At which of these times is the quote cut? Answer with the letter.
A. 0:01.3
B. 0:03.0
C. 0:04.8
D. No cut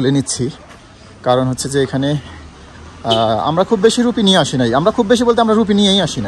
D